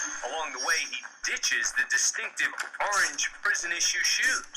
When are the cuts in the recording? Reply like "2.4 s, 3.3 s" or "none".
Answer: none